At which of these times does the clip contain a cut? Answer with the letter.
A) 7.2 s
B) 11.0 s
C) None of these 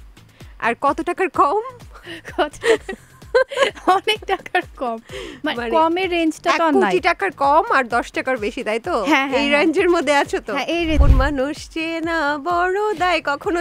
B